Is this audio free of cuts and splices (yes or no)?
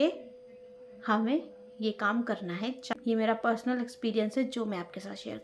no